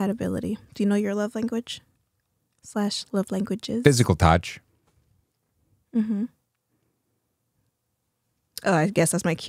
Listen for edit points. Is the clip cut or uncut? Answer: uncut